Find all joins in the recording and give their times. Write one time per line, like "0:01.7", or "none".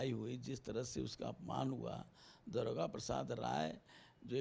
none